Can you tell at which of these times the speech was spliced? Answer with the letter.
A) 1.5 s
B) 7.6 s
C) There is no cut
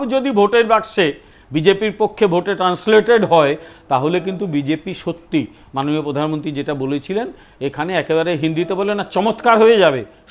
C